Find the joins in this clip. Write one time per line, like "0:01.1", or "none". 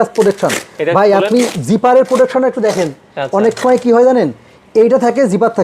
none